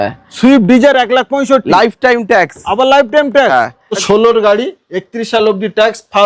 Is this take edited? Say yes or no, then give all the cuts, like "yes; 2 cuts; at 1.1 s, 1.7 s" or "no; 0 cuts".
yes; 1 cut; at 4.0 s